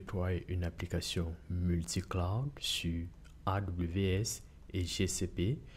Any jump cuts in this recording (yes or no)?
no